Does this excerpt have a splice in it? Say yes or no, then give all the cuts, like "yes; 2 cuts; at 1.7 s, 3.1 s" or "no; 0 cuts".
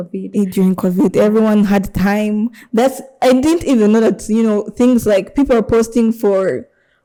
no; 0 cuts